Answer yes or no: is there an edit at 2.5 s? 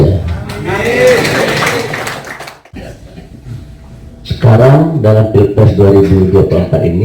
yes